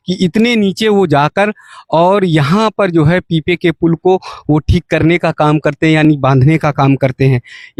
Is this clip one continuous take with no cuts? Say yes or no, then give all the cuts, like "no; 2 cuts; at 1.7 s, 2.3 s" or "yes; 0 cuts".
yes; 0 cuts